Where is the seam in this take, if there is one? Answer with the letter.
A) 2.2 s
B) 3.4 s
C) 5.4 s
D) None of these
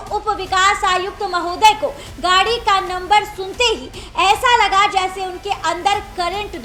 D